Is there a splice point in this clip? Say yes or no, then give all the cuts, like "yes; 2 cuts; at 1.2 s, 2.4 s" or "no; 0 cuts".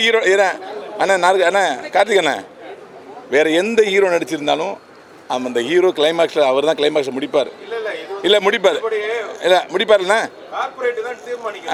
no; 0 cuts